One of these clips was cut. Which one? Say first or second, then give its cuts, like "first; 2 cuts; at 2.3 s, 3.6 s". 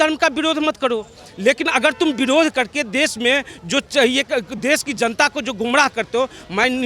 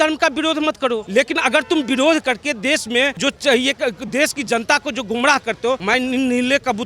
second; 3 cuts; at 1.1 s, 3.2 s, 5.8 s